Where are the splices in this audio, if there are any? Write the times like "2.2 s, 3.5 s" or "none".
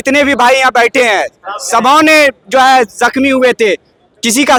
none